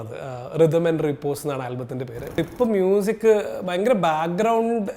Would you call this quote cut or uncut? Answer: cut